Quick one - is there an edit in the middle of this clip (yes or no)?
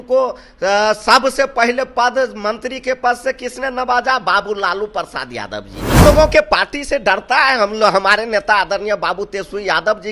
yes